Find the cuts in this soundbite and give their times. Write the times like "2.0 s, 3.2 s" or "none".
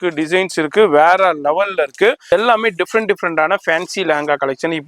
2.3 s